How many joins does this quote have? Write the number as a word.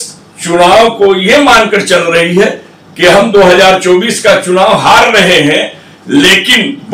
zero